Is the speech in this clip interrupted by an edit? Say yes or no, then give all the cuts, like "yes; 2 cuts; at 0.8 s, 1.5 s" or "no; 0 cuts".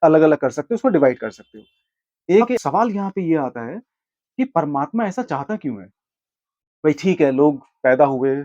yes; 1 cut; at 2.6 s